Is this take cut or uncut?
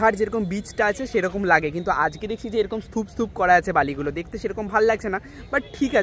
uncut